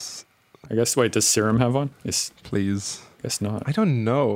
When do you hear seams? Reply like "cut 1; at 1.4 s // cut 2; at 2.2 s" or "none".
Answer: none